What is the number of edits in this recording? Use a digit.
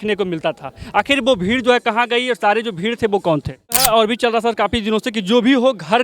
1